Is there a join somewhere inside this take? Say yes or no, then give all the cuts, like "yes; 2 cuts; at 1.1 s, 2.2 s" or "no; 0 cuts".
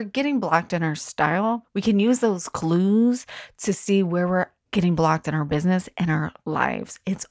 yes; 2 cuts; at 1.7 s, 4.6 s